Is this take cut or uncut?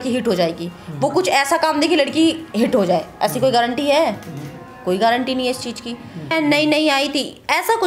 cut